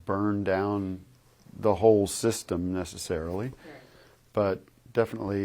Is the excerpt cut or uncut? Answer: uncut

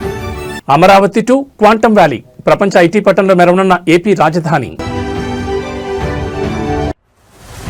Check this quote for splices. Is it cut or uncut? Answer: uncut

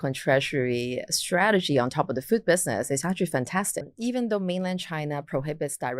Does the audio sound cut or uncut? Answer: cut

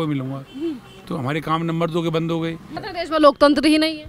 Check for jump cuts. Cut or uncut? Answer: cut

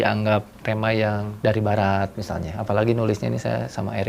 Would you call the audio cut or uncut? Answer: cut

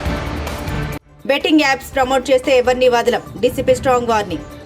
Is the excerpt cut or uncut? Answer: cut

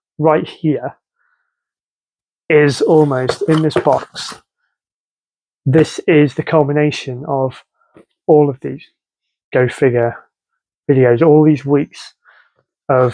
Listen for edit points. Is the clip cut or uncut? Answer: uncut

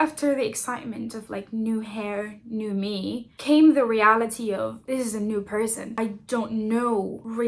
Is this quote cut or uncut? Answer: uncut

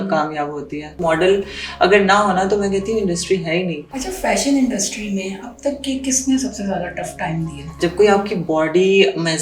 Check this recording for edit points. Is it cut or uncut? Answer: cut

